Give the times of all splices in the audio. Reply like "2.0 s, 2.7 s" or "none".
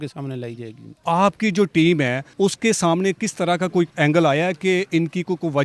0.9 s, 2.2 s, 3.9 s